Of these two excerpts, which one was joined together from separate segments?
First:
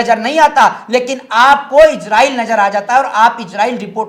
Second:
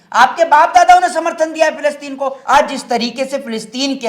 second; 1 cut; at 2.4 s

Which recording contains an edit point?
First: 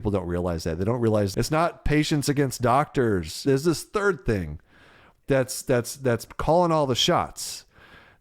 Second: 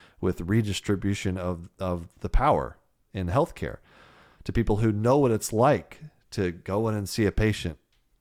first; 2 cuts; at 1.3 s, 3.4 s

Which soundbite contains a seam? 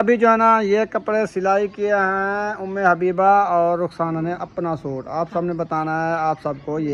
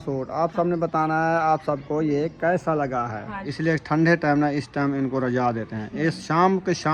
second; 1 cut; at 3.4 s

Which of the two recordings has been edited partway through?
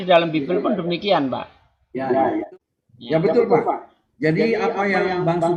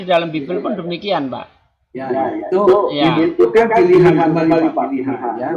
first; 1 cut; at 2.5 s

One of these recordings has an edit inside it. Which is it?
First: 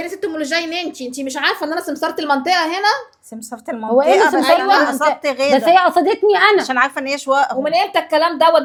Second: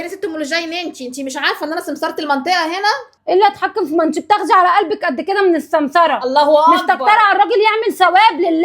second; 1 cut; at 3.1 s

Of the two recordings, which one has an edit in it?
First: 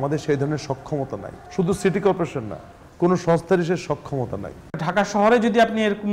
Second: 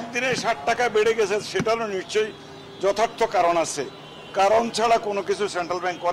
first; 2 cuts; at 1.4 s, 4.6 s

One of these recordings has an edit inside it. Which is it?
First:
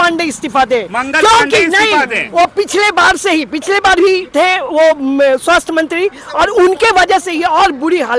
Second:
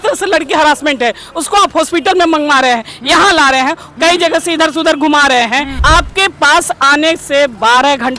second; 1 cut; at 5.7 s

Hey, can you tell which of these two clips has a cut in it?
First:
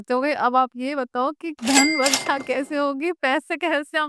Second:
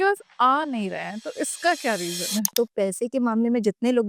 second; 1 cut; at 2.5 s

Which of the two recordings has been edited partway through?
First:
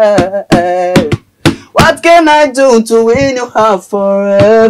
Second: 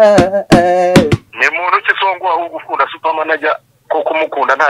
second; 1 cut; at 1.2 s

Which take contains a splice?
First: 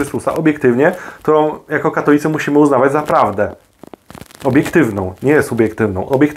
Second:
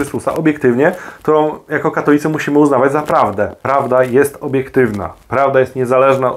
second; 1 cut; at 3.6 s

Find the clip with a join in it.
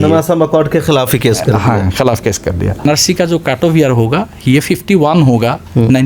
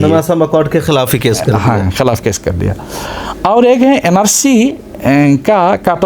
first; 1 cut; at 2.8 s

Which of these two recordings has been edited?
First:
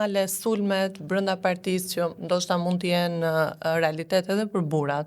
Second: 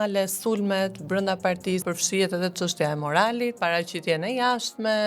second; 2 cuts; at 1.9 s, 3.6 s

